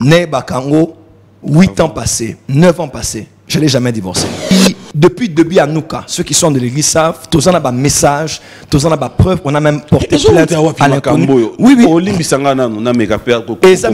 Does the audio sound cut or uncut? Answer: cut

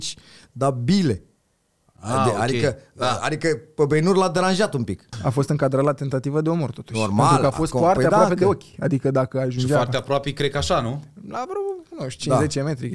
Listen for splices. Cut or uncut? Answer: cut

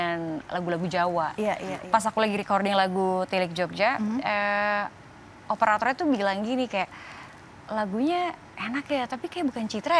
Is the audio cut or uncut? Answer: cut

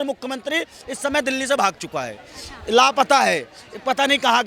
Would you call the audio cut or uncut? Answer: uncut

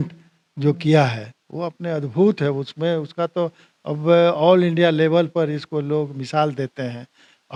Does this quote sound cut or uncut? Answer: uncut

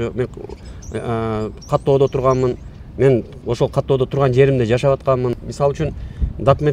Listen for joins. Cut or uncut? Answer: cut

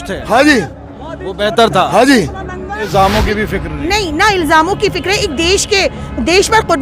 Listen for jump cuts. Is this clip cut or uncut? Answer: cut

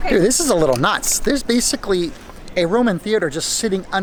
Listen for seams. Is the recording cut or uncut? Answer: uncut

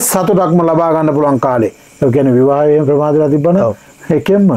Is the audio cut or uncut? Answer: uncut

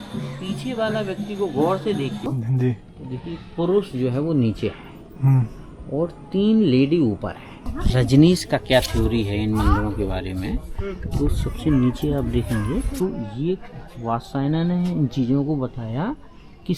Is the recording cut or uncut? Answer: cut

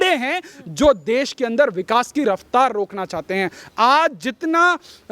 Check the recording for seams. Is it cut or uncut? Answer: uncut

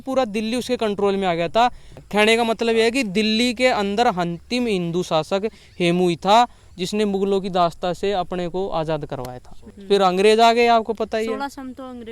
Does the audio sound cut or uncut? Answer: uncut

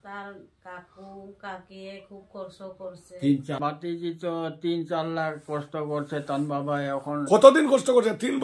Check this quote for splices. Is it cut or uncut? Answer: cut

